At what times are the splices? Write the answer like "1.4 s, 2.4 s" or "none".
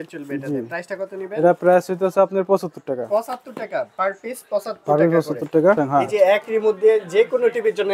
5.8 s